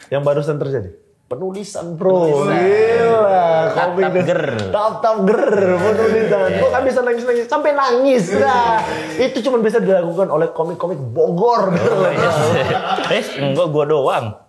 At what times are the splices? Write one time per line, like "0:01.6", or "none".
none